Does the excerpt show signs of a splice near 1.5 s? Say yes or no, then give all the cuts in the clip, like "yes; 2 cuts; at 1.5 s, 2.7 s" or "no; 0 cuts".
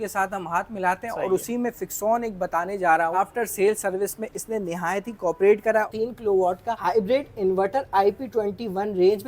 no; 2 cuts; at 3.1 s, 5.9 s